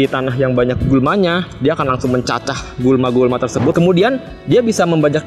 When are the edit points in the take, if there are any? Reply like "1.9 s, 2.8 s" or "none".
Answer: 3.7 s